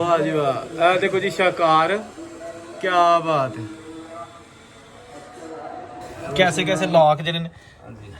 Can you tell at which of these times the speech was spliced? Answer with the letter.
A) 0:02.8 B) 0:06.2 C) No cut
B